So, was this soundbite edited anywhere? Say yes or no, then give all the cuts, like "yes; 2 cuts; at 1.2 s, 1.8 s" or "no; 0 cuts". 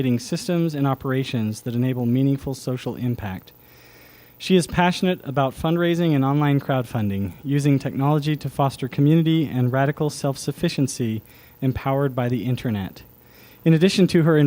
yes; 1 cut; at 11.1 s